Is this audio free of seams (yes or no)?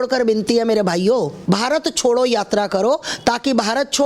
no